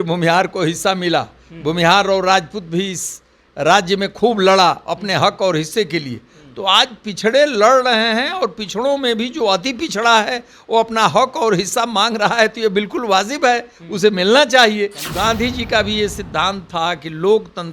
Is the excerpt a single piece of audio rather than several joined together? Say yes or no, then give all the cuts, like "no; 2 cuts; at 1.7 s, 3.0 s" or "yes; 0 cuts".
no; 1 cut; at 15.1 s